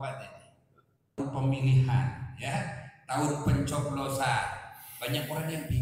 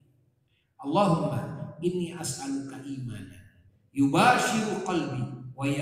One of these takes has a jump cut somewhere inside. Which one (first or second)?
first